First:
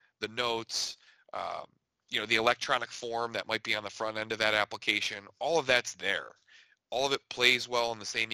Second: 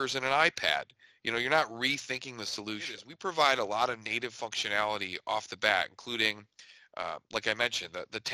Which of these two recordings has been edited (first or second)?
second